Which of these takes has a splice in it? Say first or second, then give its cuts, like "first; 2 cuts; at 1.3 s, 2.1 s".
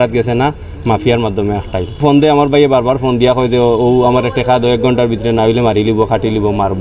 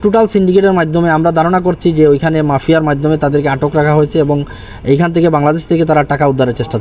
first; 1 cut; at 2.0 s